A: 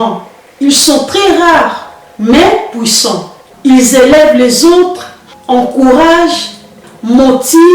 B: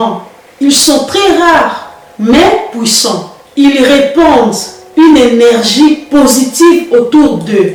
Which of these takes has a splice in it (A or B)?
A